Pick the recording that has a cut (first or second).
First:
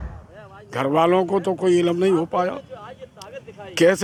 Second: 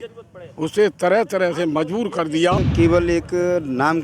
second